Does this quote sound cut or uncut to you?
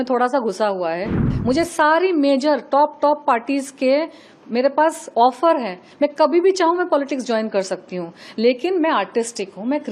cut